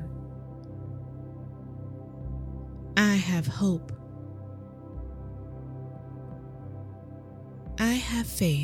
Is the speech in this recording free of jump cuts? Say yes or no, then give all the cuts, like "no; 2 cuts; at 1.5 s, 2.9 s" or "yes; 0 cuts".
yes; 0 cuts